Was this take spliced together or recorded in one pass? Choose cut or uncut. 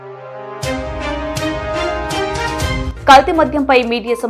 uncut